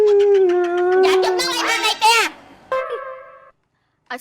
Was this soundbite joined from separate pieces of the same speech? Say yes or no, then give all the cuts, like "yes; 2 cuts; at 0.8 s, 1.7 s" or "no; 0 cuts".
yes; 1 cut; at 2.7 s